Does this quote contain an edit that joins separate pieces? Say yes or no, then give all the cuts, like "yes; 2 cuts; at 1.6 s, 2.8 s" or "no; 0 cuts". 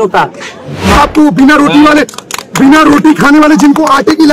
yes; 1 cut; at 0.9 s